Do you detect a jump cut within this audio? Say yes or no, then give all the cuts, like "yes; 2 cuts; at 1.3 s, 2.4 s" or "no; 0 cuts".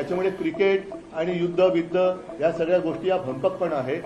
no; 0 cuts